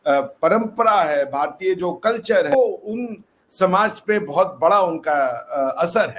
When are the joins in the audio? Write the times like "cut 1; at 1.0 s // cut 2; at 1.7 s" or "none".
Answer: cut 1; at 2.5 s